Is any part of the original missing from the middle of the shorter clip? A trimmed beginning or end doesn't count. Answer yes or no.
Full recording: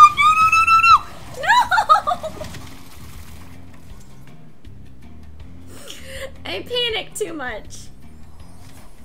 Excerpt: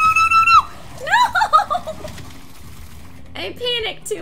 yes